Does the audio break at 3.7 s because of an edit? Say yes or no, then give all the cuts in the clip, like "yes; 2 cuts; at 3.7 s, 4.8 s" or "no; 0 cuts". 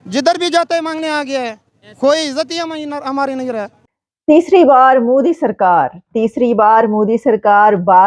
yes; 1 cut; at 3.7 s